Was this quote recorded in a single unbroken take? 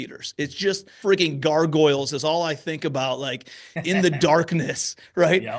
no; 1 cut; at 0.9 s

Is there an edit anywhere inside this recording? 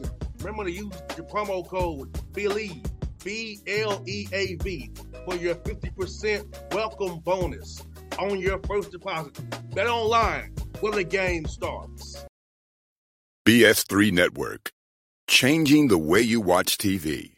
yes; 1 cut; at 12.2 s

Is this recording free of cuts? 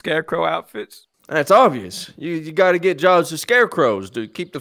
yes; 0 cuts

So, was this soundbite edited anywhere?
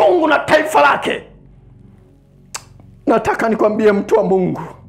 no; 0 cuts

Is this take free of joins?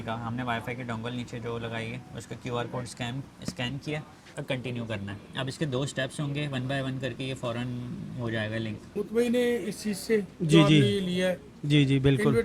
no; 2 cuts; at 4.3 s, 9.0 s

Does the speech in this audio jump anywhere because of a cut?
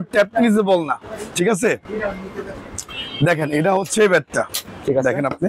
no; 0 cuts

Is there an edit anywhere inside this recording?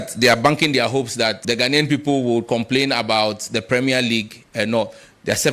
yes; 1 cut; at 1.4 s

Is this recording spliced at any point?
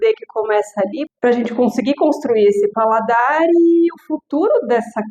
yes; 1 cut; at 1.1 s

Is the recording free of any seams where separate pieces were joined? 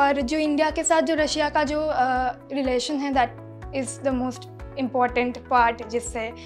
yes; 0 cuts

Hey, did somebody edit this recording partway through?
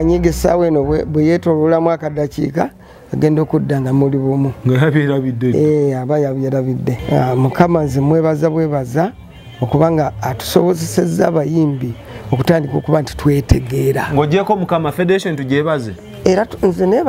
yes; 1 cut; at 7.0 s

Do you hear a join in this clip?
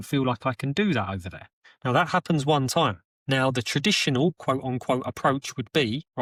no; 0 cuts

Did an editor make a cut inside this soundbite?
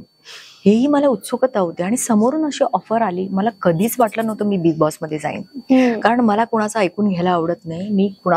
no; 0 cuts

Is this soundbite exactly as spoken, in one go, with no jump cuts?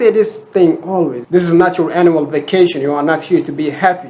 no; 1 cut; at 1.2 s

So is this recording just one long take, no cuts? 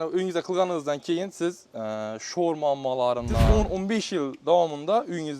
no; 1 cut; at 3.5 s

